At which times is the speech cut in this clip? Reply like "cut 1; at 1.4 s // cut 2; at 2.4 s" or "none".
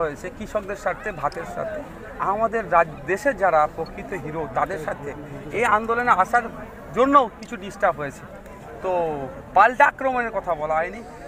none